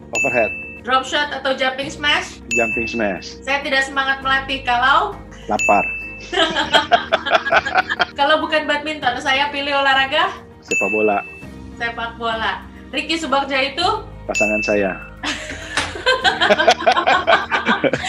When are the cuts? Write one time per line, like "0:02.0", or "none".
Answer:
none